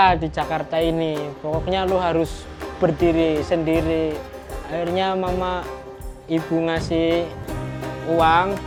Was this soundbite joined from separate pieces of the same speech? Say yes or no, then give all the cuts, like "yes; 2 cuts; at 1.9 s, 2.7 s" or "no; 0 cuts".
no; 0 cuts